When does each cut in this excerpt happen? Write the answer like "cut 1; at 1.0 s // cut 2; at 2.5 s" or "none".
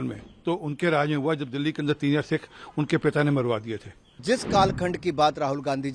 cut 1; at 4.1 s